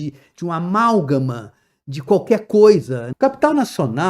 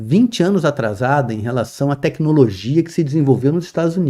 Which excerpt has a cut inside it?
first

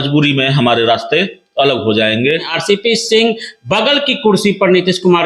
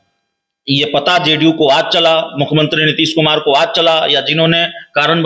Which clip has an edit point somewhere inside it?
first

